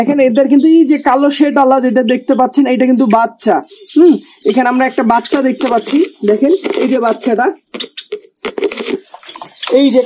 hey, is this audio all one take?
yes; 0 cuts

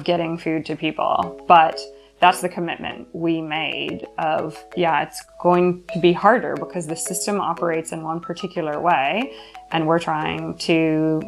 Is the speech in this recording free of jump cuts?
yes; 0 cuts

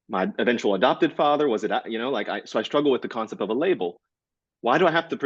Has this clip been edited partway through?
no; 0 cuts

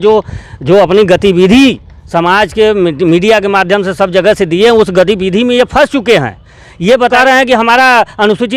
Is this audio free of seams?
no; 1 cut; at 7.1 s

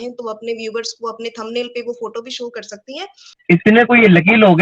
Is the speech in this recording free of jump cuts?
no; 1 cut; at 3.3 s

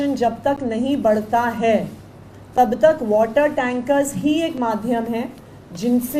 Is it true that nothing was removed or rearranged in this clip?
yes; 0 cuts

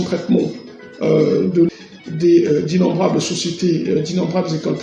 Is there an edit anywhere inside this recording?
no; 0 cuts

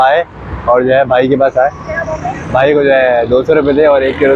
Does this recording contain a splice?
no; 0 cuts

